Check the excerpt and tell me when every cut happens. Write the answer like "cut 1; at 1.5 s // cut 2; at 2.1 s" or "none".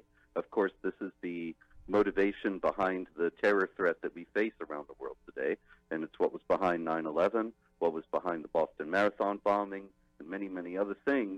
cut 1; at 5.2 s